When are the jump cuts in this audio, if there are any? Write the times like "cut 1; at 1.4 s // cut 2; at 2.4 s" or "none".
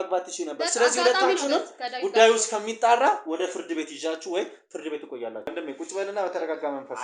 cut 1; at 5.5 s